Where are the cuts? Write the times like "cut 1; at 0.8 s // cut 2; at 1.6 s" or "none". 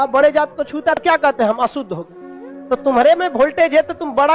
cut 1; at 1.0 s